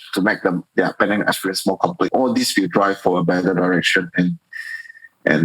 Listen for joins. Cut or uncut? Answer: cut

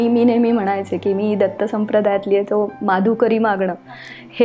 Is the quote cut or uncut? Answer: uncut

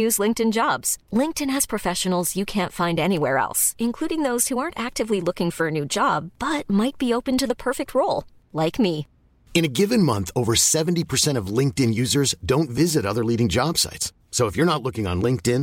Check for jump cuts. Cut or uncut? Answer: uncut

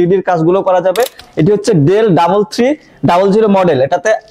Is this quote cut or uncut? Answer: cut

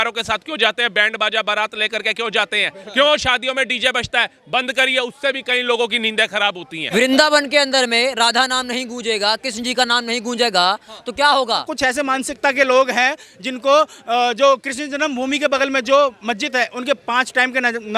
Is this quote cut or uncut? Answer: cut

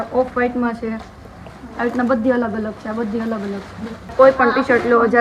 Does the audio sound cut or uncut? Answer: cut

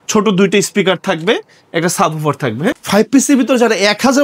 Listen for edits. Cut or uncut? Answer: cut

